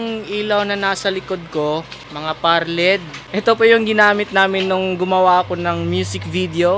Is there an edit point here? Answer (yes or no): yes